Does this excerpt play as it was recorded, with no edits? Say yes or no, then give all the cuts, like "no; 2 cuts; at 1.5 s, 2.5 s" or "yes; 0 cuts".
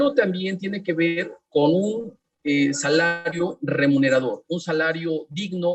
yes; 0 cuts